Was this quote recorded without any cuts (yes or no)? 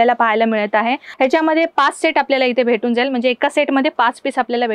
no